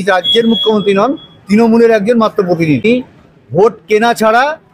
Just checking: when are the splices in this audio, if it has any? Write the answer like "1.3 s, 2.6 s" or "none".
2.8 s